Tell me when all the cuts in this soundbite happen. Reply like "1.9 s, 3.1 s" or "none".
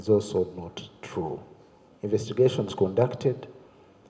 none